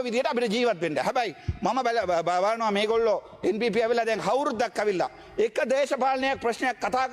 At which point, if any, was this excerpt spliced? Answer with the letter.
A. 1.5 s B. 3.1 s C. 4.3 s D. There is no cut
D